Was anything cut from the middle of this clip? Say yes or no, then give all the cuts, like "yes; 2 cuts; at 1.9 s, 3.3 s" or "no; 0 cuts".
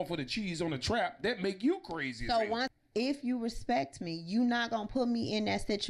yes; 1 cut; at 2.7 s